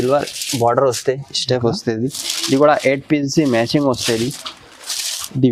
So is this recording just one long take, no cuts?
yes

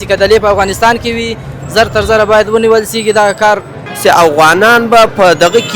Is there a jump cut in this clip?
yes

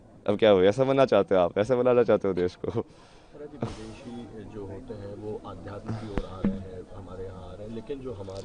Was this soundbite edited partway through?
no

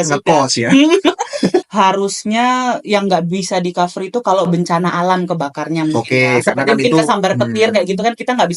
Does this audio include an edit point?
yes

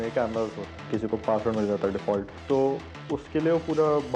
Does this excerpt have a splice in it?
yes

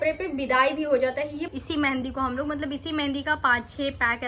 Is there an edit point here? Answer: yes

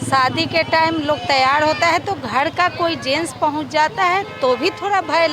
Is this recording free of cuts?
yes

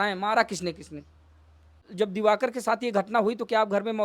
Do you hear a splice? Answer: yes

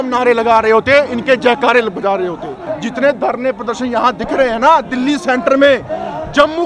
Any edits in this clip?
yes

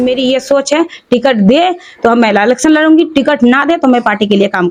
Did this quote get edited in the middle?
no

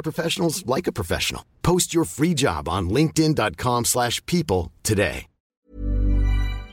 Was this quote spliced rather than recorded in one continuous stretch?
yes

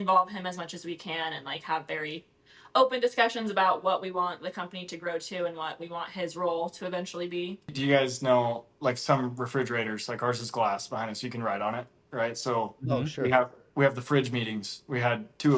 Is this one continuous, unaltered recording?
no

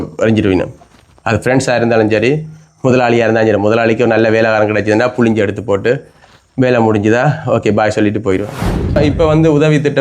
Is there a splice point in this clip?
yes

